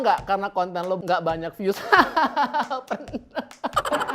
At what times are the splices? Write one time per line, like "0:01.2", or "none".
0:01.0